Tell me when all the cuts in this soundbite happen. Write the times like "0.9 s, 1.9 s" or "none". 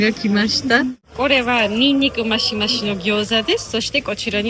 1.1 s